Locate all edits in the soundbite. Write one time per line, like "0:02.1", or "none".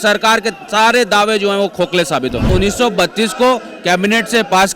0:02.5

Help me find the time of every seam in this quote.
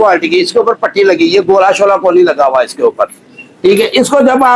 none

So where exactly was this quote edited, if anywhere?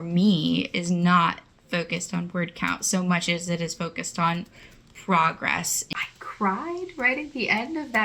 0:05.8

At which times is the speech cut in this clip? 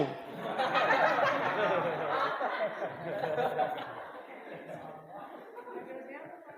0:01.5

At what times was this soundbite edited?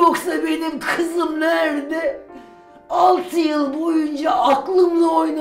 none

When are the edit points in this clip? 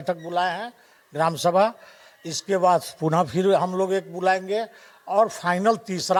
none

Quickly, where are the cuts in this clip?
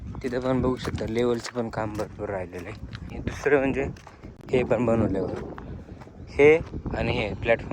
0:03.1

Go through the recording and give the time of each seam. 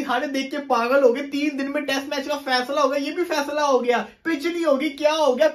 none

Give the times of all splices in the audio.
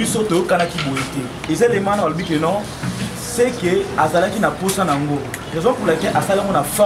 0:01.4

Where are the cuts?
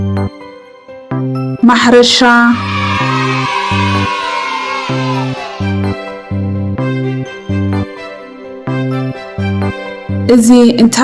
0:01.6

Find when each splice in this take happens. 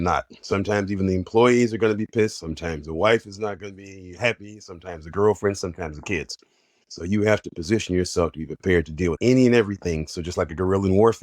0:09.2

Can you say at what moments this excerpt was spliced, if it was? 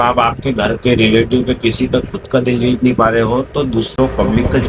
none

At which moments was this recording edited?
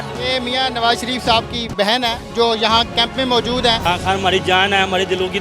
0:03.8

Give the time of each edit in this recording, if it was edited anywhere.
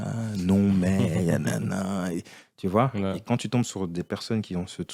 none

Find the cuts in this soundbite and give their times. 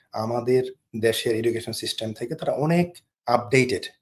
none

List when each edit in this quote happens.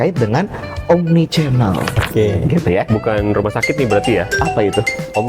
0:02.0

